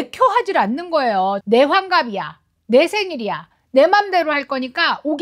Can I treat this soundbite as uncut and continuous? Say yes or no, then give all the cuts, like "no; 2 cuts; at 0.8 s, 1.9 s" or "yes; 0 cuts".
no; 1 cut; at 1.4 s